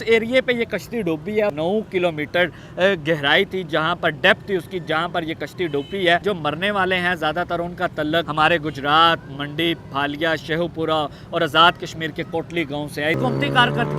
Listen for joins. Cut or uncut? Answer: cut